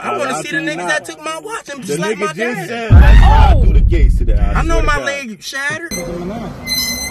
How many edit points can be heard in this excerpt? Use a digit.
0